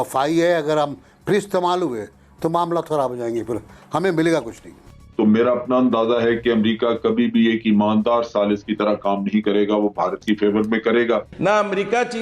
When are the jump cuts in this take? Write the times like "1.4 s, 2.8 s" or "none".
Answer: 5.0 s, 11.3 s

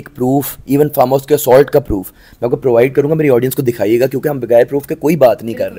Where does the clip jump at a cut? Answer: none

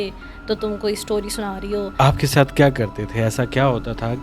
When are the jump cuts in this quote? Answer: 1.9 s

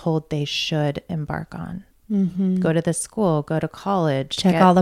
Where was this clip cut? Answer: 1.9 s

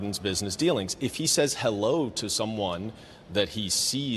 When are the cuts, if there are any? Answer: 1.2 s

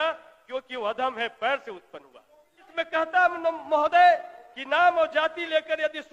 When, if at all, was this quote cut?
2.6 s

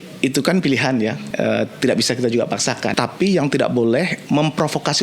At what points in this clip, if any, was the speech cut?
1.2 s, 2.9 s

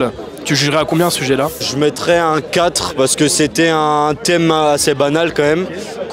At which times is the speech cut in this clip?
none

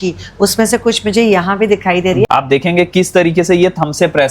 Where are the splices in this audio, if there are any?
2.3 s

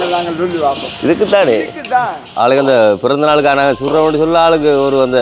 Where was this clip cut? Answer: 2.2 s

